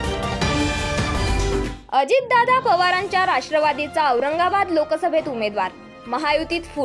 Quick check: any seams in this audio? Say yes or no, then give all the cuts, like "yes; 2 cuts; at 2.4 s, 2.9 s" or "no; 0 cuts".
yes; 1 cut; at 1.2 s